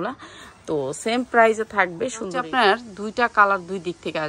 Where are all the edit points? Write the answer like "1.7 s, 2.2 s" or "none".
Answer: 2.3 s